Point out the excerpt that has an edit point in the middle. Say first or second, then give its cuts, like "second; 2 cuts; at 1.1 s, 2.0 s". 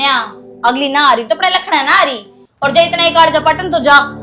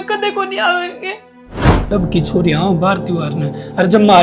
second; 1 cut; at 1.8 s